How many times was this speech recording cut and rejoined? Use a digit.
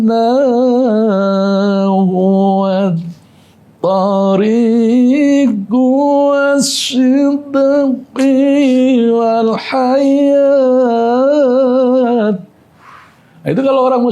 0